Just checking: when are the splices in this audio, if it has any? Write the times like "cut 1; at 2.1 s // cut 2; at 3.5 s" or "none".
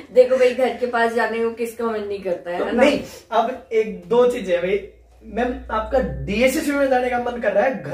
none

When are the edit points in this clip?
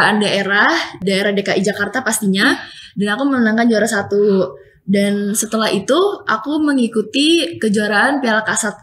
none

